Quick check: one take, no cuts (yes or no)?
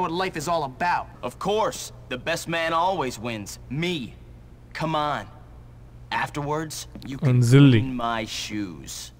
yes